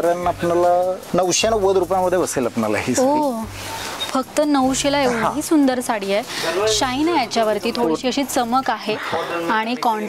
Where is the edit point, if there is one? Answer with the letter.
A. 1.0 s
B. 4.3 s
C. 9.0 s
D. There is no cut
A